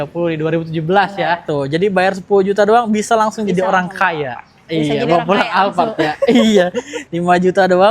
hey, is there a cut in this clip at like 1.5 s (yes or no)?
yes